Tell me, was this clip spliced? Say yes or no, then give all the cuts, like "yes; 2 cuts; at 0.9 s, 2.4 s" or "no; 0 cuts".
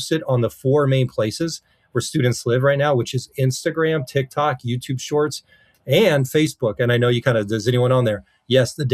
no; 0 cuts